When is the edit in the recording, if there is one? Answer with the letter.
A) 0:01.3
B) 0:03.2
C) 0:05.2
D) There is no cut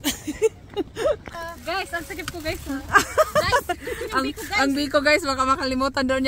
A